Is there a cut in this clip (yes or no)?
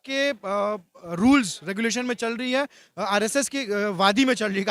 no